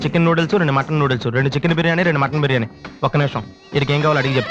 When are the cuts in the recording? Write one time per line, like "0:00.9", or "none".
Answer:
none